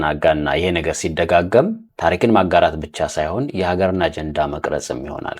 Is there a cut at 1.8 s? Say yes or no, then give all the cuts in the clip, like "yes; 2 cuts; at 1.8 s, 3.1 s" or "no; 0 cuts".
yes; 1 cut; at 1.8 s